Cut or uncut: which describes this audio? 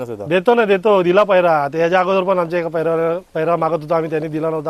uncut